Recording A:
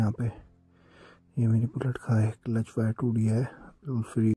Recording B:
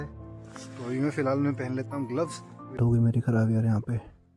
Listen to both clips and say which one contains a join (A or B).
B